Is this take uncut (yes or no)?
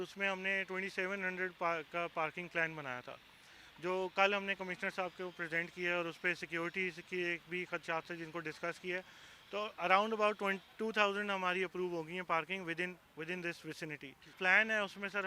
no